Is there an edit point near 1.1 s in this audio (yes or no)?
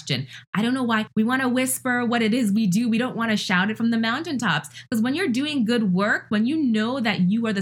yes